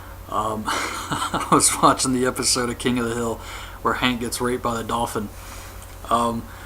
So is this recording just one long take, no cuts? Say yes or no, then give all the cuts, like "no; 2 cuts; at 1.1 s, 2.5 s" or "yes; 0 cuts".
no; 1 cut; at 4.6 s